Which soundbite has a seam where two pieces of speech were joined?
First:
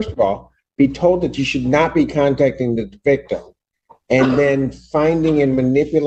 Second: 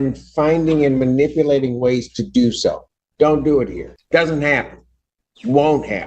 second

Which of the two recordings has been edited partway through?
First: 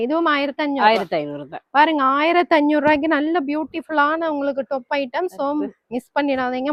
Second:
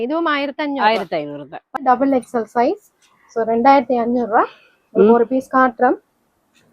second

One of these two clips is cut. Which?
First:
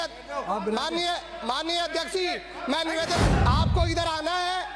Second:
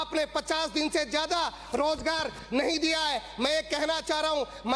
first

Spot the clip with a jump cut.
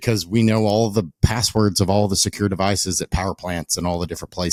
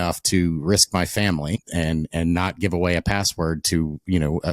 second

